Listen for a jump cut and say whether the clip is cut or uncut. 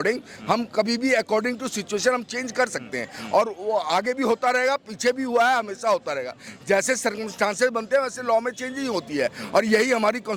uncut